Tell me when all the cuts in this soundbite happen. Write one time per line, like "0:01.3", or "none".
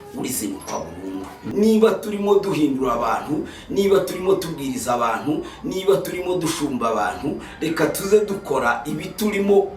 0:01.4